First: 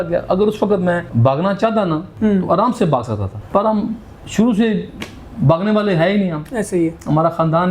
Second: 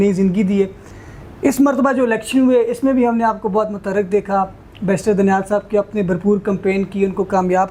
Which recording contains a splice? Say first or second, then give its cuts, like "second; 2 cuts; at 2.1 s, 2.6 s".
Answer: first; 3 cuts; at 1.1 s, 2.1 s, 3.3 s